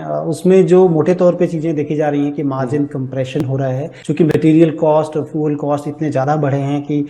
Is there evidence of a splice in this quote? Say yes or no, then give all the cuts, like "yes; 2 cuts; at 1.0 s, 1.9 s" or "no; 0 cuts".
yes; 1 cut; at 3.9 s